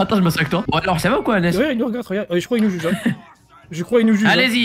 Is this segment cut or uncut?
uncut